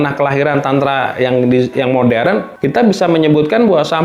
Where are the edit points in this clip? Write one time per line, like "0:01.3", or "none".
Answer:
0:02.5